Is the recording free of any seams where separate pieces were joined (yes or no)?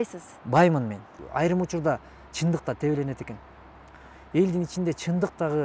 no